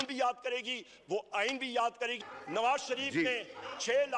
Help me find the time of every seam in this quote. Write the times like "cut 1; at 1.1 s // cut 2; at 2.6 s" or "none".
cut 1; at 2.3 s